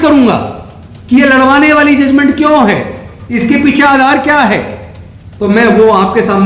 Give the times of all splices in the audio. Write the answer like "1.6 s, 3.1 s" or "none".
none